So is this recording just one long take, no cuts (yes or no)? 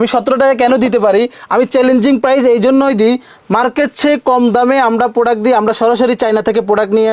yes